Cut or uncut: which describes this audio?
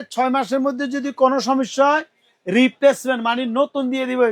uncut